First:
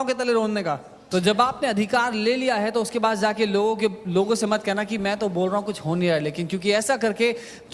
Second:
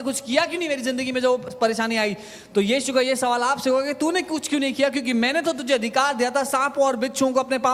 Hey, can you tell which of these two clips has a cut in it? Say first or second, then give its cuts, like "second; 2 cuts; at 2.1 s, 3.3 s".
first; 1 cut; at 0.9 s